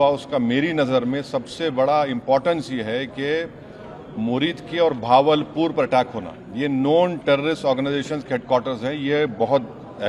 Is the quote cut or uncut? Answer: uncut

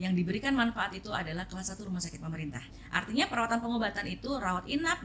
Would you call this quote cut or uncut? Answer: cut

